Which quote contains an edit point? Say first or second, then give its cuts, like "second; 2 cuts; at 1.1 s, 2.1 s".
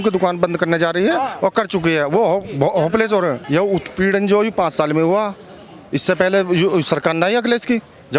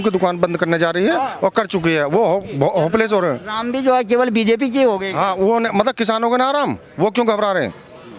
first; 1 cut; at 3.4 s